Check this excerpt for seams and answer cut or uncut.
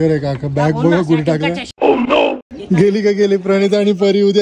uncut